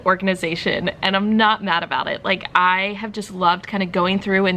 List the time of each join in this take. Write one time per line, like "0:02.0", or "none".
none